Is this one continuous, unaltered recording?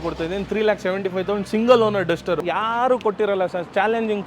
no; 1 cut; at 2.4 s

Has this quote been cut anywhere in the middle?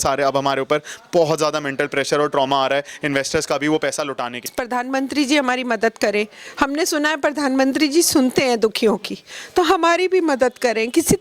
yes; 1 cut; at 4.5 s

